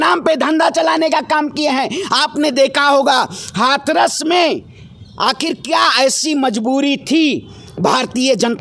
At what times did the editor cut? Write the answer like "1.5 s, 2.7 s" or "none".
none